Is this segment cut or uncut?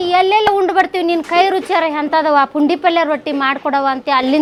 uncut